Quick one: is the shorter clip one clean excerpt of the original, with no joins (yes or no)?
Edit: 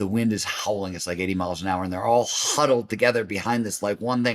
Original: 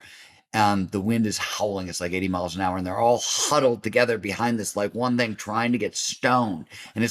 yes